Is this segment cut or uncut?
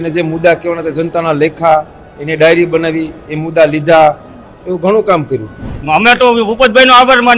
cut